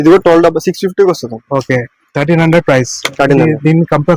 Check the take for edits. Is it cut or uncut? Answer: uncut